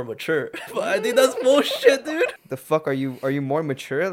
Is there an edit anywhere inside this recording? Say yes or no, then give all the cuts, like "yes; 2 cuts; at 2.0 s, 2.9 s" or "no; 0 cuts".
yes; 1 cut; at 2.4 s